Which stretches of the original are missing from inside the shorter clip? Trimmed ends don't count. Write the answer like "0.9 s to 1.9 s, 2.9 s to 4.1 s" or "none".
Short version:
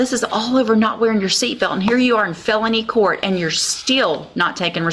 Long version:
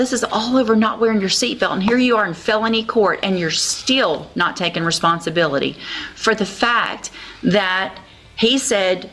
none